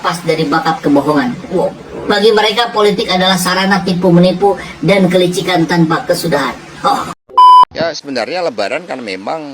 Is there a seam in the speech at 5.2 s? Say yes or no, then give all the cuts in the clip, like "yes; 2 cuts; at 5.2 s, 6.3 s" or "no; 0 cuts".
no; 2 cuts; at 7.1 s, 7.8 s